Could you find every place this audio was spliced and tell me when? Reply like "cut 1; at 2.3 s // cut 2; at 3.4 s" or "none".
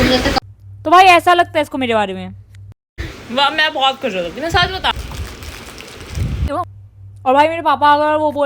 cut 1; at 6.4 s